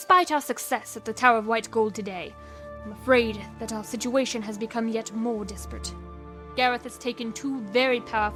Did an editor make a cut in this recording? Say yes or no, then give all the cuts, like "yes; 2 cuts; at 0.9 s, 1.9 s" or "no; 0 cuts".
no; 0 cuts